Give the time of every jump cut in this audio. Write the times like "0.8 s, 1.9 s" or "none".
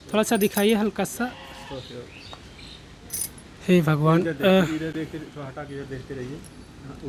none